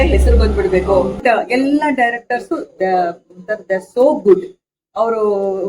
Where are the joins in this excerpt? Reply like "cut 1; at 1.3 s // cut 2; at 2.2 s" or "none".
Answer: cut 1; at 1.2 s